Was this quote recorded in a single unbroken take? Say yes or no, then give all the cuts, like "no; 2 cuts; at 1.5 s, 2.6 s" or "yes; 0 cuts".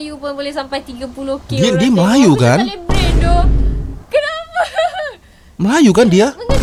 yes; 0 cuts